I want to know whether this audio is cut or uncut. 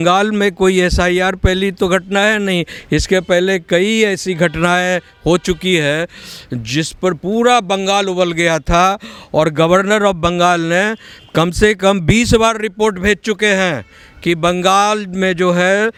uncut